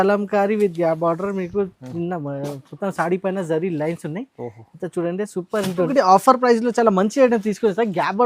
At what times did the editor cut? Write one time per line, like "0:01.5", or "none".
0:05.9